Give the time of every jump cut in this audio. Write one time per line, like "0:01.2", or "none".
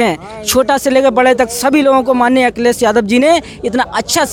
none